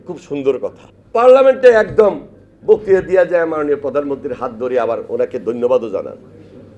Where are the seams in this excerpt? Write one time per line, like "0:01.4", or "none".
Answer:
0:00.9